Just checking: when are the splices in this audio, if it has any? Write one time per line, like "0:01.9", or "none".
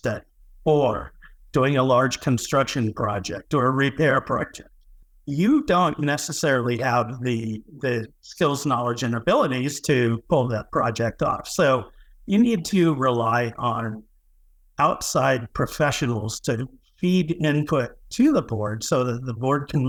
none